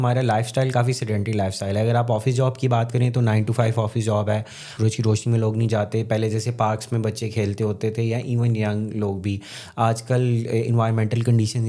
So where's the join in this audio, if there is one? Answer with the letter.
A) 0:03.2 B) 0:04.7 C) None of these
B